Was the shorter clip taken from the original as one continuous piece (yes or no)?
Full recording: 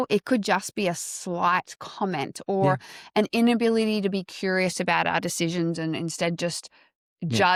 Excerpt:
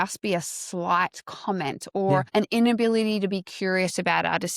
no